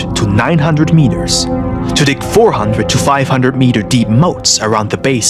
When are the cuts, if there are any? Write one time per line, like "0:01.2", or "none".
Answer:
none